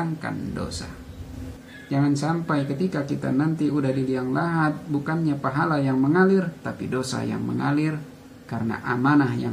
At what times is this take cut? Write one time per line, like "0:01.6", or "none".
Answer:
0:01.5